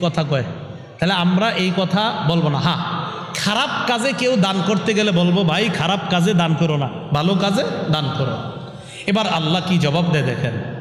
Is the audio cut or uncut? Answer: uncut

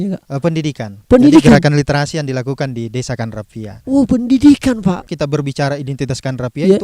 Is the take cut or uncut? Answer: cut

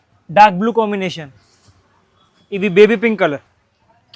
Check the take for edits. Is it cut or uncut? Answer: uncut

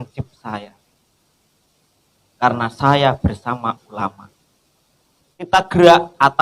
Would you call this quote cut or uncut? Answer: cut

